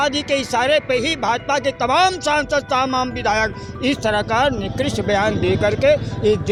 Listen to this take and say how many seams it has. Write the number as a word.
zero